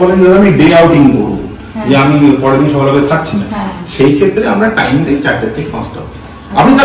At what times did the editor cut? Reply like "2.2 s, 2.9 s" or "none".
none